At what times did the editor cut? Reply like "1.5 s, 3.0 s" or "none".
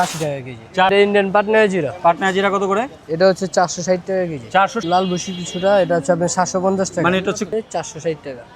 0.9 s, 4.8 s, 7.5 s